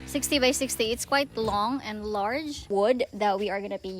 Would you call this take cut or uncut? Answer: cut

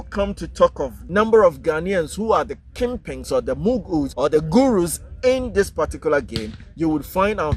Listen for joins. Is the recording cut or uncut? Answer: cut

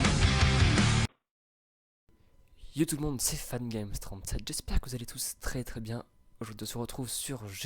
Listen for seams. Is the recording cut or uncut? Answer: uncut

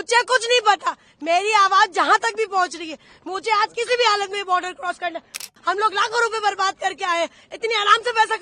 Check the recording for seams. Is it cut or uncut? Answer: cut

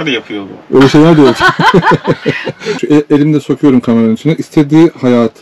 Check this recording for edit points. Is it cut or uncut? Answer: cut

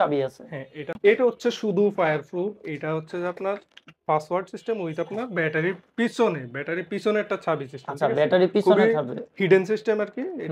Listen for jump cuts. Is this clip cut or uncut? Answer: cut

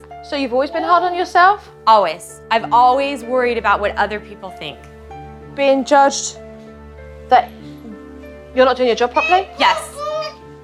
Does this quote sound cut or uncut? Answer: uncut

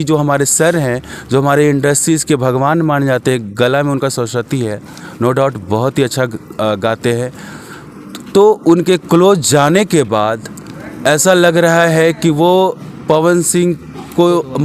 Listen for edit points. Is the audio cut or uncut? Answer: uncut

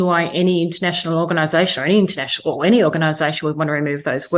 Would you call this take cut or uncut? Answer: uncut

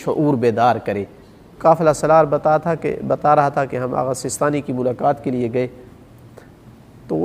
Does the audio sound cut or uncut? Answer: cut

